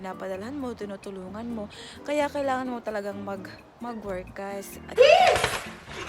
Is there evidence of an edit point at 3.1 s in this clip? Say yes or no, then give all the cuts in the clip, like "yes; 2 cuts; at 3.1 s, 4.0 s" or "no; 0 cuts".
no; 1 cut; at 4.9 s